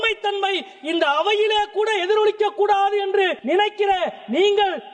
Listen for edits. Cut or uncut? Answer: cut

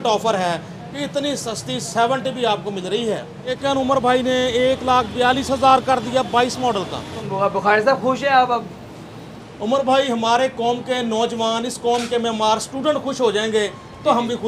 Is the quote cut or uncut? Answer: cut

